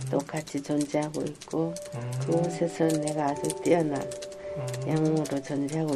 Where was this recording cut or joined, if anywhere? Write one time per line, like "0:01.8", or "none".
none